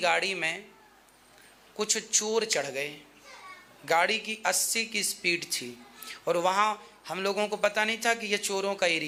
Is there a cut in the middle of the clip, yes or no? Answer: no